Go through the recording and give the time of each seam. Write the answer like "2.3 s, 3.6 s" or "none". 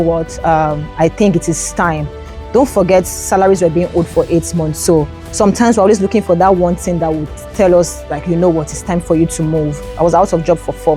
9.7 s